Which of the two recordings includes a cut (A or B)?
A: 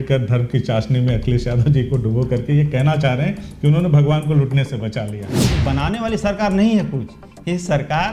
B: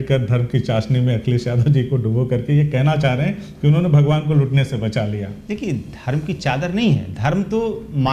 A